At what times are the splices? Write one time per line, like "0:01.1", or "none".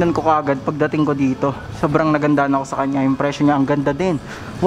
none